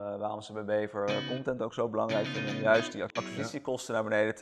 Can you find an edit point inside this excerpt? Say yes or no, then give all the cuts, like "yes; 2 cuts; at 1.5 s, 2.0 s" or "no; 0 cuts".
yes; 1 cut; at 3.1 s